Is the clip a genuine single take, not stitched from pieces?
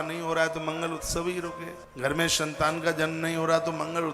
no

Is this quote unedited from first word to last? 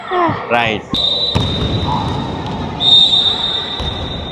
yes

